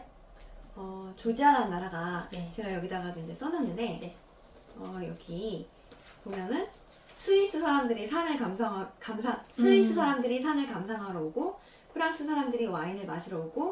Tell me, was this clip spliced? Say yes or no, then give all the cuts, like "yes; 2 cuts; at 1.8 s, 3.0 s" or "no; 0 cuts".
no; 0 cuts